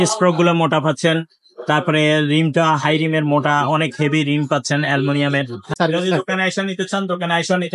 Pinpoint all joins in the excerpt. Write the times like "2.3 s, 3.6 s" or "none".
5.7 s